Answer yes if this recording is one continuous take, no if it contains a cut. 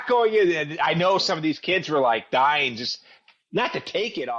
yes